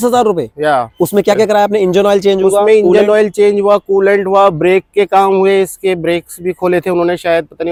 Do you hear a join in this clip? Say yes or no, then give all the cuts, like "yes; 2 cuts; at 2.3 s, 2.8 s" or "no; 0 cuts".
no; 0 cuts